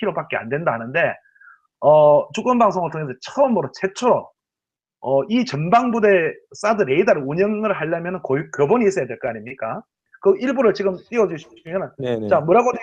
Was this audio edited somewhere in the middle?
yes; 1 cut; at 10.3 s

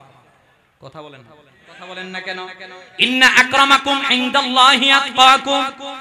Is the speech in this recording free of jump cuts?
no; 1 cut; at 1.8 s

